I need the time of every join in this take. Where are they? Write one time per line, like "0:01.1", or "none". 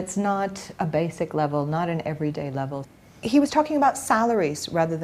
0:02.9